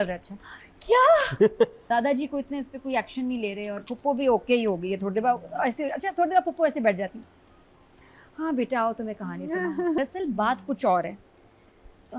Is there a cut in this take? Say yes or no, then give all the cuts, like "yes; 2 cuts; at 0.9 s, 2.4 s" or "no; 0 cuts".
yes; 2 cuts; at 1.8 s, 10.0 s